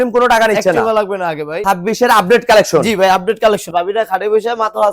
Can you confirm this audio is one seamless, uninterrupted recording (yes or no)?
no